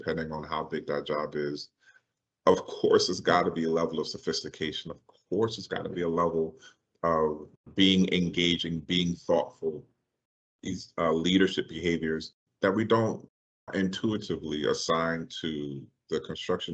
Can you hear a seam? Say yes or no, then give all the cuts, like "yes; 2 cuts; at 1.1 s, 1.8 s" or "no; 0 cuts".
yes; 1 cut; at 7.5 s